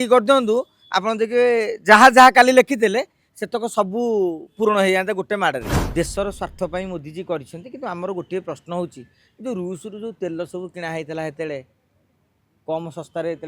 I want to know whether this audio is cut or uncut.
cut